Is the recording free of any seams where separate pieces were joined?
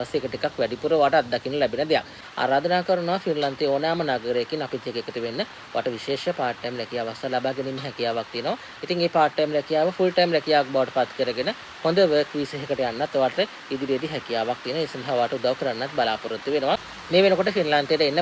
no; 2 cuts; at 2.2 s, 16.9 s

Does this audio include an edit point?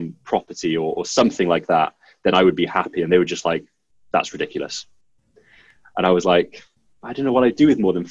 no; 0 cuts

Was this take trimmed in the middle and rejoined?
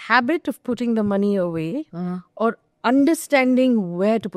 no; 0 cuts

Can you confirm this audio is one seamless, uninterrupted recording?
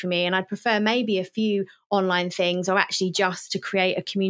yes; 0 cuts

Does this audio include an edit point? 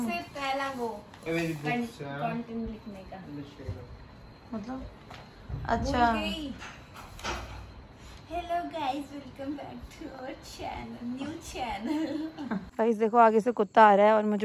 yes; 1 cut; at 12.7 s

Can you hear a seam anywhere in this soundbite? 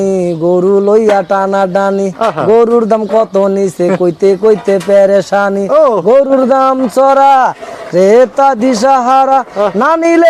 no; 0 cuts

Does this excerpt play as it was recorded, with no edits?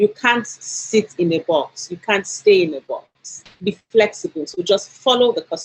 yes; 0 cuts

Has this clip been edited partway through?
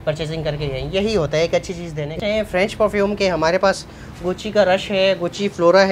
yes; 1 cut; at 2.2 s

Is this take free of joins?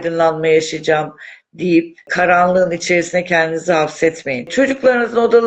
no; 2 cuts; at 2.1 s, 4.5 s

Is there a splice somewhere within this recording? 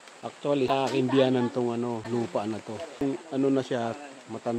yes; 3 cuts; at 0.7 s, 2.0 s, 3.0 s

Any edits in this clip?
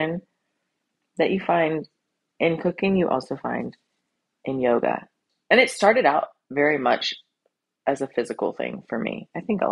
yes; 1 cut; at 5.3 s

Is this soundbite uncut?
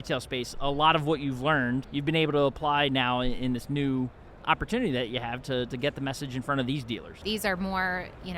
no; 2 cuts; at 2.0 s, 7.1 s

